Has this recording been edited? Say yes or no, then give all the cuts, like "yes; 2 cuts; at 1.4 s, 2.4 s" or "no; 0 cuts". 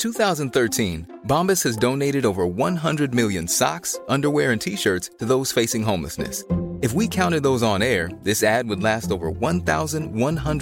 no; 0 cuts